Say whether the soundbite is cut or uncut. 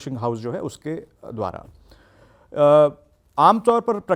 uncut